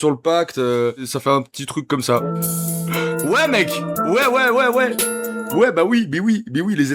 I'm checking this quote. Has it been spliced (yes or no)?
yes